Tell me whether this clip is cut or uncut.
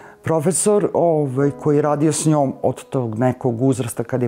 uncut